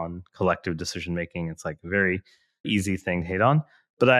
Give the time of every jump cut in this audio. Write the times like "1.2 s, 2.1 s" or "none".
2.7 s